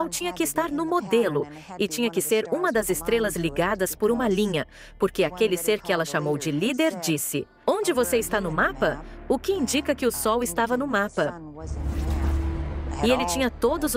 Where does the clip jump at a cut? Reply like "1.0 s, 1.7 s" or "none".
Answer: 11.6 s, 13.0 s